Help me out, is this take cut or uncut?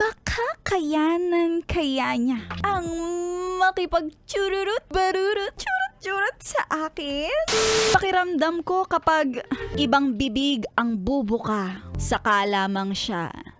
cut